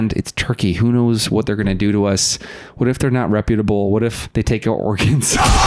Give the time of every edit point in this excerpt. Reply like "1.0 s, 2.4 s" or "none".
4.2 s

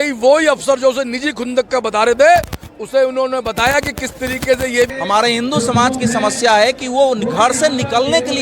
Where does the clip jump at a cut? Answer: 4.9 s

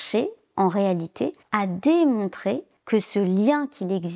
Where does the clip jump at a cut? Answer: 1.4 s, 2.7 s

